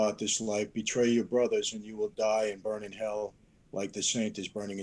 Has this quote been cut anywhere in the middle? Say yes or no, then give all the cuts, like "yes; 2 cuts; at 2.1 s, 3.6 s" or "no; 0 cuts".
no; 0 cuts